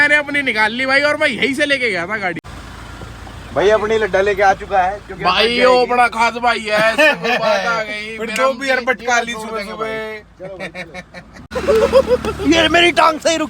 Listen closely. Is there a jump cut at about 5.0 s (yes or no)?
no